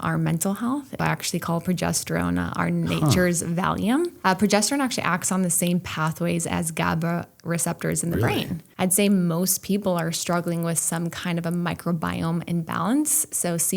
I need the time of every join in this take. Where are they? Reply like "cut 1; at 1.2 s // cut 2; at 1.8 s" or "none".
cut 1; at 1.0 s // cut 2; at 4.1 s // cut 3; at 8.6 s